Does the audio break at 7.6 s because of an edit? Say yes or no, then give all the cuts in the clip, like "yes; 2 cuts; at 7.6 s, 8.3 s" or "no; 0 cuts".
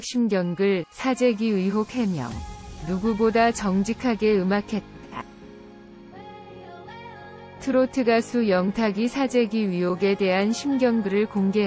yes; 2 cuts; at 5.2 s, 7.6 s